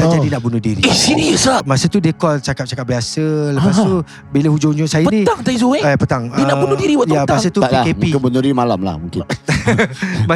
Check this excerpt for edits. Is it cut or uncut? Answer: cut